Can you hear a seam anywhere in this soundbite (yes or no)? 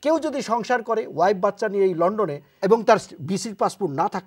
no